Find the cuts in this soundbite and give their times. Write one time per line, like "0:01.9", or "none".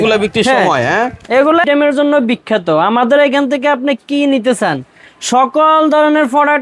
0:01.6

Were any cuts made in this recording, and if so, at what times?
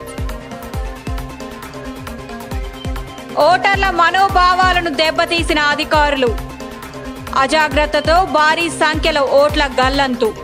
none

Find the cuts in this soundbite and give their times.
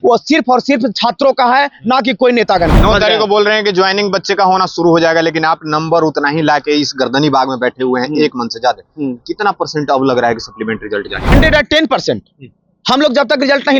0:02.7
0:11.2

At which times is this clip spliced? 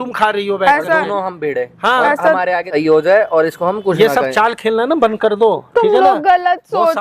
0:02.7

